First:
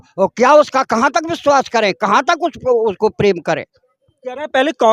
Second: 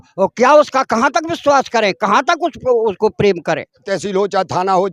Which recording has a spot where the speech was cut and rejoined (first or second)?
second